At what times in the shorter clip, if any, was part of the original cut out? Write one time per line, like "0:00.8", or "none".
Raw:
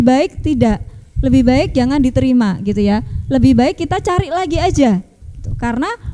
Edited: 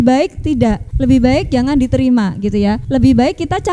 0:00.9
0:02.8